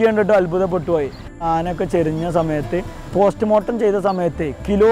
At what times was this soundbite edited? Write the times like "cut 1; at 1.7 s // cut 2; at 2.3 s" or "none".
none